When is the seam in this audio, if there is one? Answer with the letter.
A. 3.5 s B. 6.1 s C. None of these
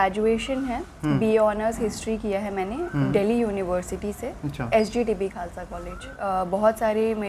B